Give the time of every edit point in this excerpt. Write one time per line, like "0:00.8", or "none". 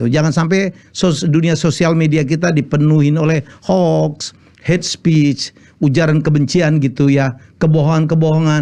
none